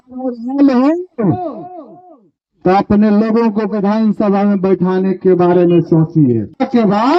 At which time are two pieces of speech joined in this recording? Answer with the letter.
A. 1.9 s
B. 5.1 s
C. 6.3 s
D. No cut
D